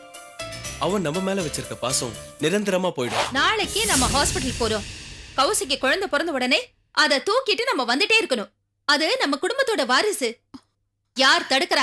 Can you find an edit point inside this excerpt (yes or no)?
yes